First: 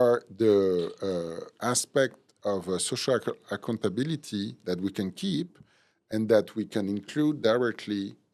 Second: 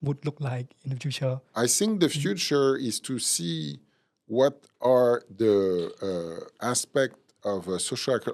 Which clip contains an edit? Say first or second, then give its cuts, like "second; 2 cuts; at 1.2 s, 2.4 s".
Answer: second; 1 cut; at 1.4 s